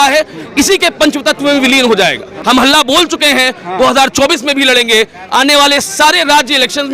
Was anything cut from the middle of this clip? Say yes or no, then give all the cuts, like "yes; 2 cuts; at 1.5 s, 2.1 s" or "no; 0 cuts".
yes; 1 cut; at 2.3 s